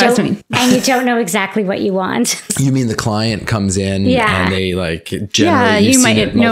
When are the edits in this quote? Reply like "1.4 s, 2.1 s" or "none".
2.5 s